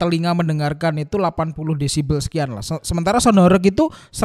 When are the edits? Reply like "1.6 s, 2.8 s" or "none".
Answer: none